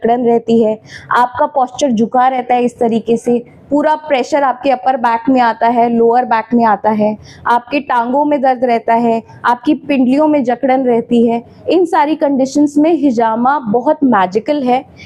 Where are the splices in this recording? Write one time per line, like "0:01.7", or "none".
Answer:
none